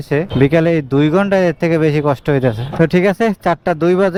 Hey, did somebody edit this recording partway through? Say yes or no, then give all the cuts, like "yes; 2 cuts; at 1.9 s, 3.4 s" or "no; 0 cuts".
no; 0 cuts